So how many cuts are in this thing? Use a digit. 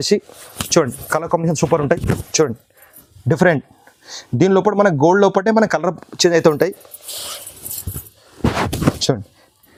0